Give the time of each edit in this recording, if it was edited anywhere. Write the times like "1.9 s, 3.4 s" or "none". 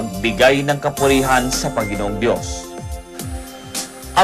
none